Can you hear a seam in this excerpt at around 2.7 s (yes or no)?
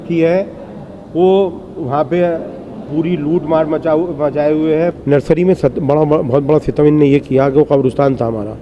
no